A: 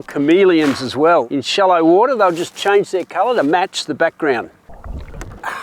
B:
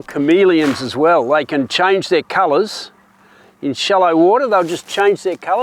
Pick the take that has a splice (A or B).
A